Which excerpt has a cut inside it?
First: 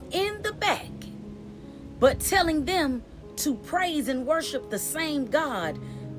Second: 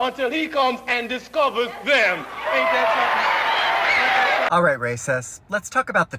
second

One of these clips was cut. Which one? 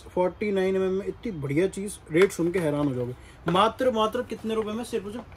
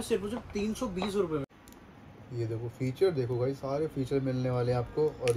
second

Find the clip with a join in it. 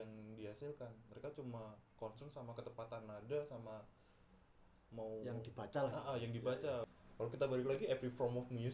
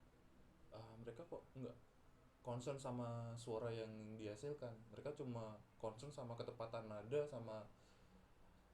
first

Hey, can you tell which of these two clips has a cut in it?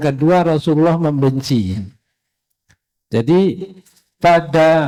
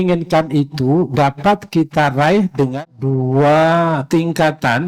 second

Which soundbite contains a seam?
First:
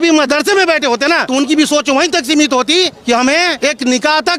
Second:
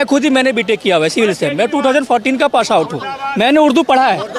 first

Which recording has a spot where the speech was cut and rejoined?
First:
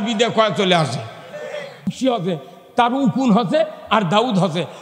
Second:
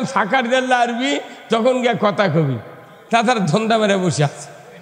first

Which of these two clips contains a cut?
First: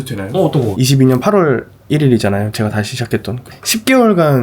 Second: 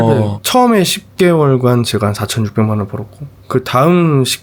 first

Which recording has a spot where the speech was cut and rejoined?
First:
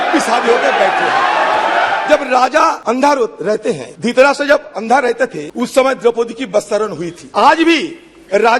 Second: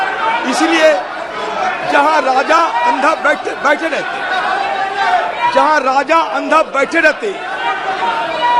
first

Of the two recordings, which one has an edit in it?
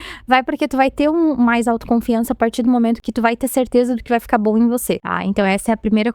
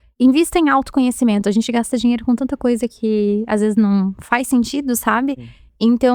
first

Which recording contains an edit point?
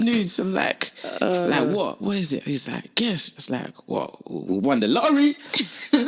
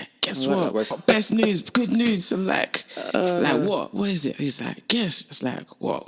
second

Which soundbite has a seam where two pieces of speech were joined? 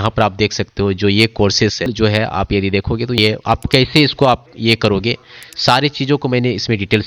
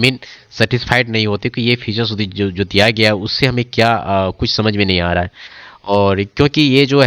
first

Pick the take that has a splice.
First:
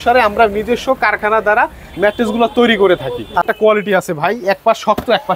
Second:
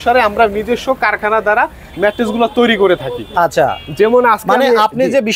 first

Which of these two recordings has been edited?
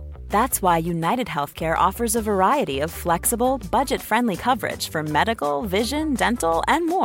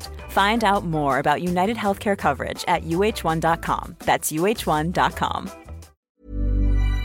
second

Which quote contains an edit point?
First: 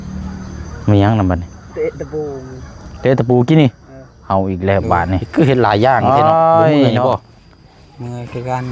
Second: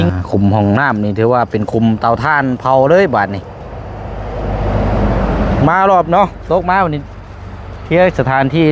first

